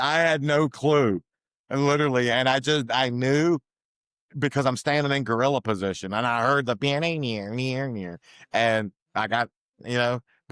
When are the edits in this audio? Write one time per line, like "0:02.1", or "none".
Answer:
none

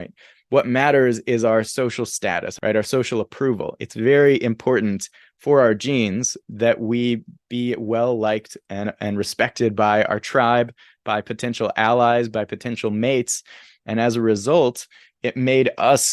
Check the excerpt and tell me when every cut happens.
0:02.5
0:06.4

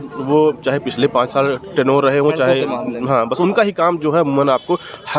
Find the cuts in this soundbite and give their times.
none

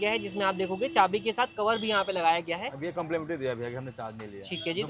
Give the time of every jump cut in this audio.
none

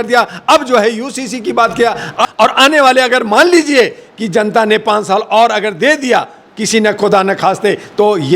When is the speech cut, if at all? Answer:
0:02.2

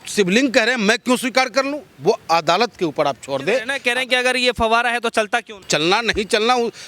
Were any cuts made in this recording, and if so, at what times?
0:03.8
0:05.5

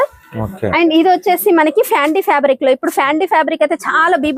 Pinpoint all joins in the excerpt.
none

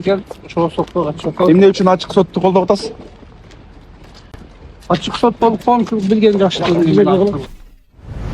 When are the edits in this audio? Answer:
0:07.3

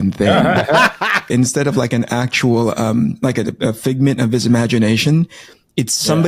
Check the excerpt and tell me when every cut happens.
0:01.3

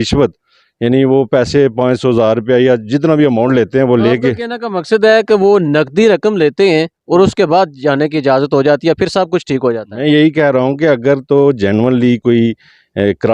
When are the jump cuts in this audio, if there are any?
none

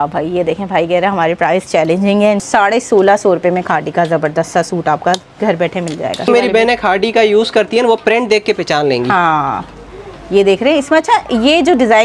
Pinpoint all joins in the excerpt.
0:02.4
0:06.3

